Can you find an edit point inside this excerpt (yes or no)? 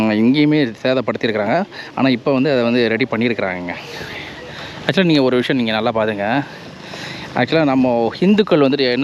no